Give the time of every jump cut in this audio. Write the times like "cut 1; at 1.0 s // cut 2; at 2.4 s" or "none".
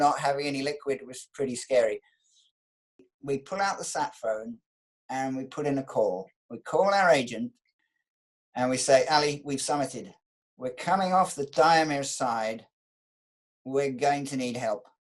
cut 1; at 2.8 s // cut 2; at 7.7 s